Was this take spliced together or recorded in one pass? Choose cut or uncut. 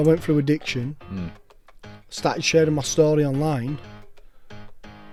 uncut